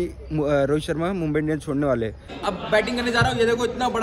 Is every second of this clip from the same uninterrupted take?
no; 1 cut; at 2.3 s

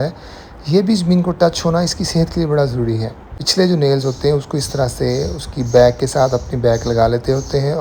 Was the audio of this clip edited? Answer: yes; 1 cut; at 3.4 s

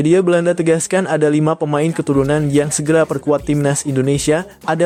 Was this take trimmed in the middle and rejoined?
no; 0 cuts

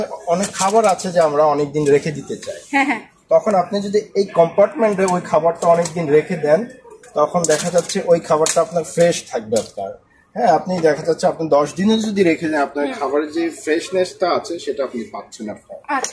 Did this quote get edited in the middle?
no; 0 cuts

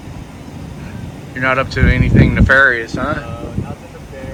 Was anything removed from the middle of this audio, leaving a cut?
no; 0 cuts

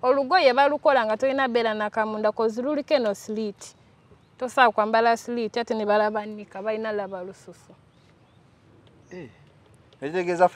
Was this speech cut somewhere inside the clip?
no; 0 cuts

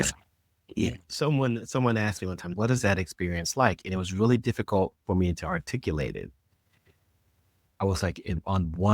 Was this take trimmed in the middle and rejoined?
yes; 1 cut; at 2.5 s

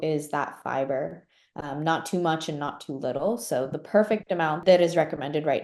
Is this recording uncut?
no; 1 cut; at 4.6 s

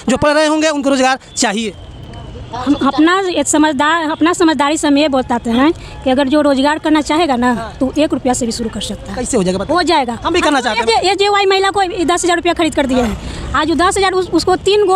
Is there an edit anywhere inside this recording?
no; 0 cuts

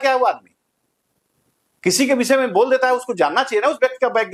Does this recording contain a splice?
no; 0 cuts

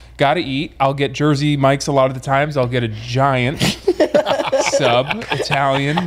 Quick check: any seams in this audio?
no; 0 cuts

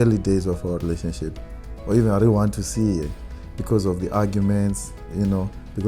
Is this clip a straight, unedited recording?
yes; 0 cuts

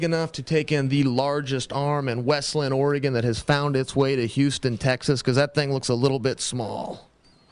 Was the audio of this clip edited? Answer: no; 0 cuts

